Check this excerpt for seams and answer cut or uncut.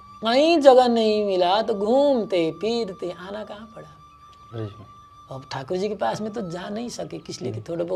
uncut